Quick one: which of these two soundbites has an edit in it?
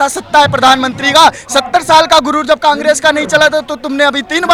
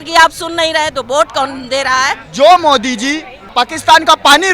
second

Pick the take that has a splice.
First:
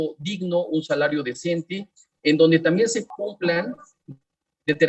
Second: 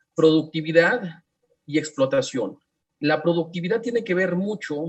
first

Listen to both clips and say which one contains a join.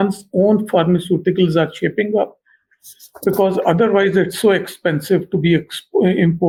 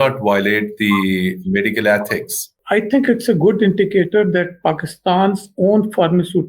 second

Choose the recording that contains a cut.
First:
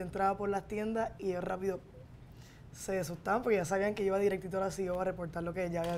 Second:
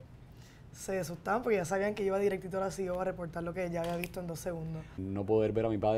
second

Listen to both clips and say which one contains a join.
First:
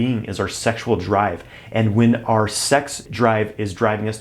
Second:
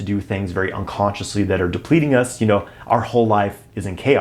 first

